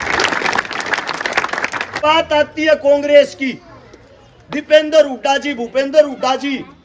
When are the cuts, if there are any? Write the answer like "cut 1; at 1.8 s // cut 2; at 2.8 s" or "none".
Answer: cut 1; at 2.0 s